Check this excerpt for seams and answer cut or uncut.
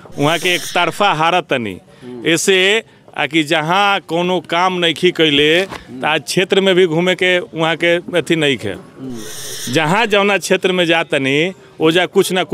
uncut